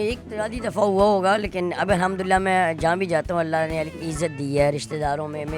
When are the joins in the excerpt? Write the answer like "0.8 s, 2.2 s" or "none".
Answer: none